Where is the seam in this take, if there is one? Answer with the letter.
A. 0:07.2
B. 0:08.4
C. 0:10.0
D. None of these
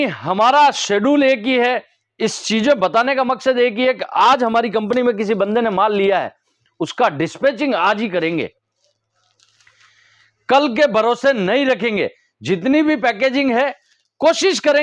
D